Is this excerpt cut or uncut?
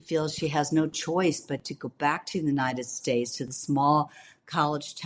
uncut